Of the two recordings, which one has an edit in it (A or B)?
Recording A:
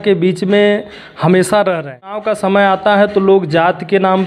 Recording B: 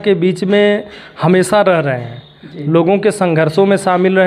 A